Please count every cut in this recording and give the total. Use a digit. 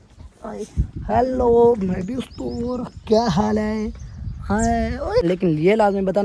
1